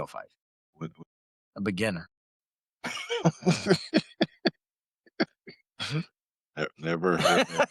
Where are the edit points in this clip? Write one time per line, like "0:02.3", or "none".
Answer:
none